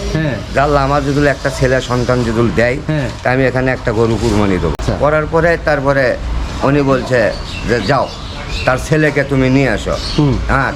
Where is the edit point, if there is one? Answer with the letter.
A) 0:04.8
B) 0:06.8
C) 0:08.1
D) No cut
A